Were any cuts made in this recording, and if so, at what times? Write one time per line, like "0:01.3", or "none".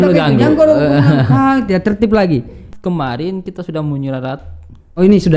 0:02.7